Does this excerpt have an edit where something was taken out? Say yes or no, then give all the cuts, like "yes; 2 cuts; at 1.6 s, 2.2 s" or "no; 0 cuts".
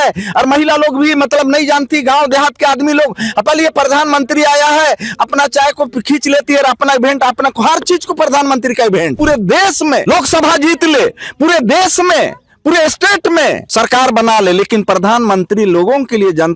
yes; 3 cuts; at 9.2 s, 10.0 s, 13.6 s